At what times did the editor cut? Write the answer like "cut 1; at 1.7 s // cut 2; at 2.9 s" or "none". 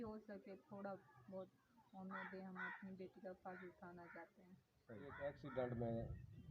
cut 1; at 5.2 s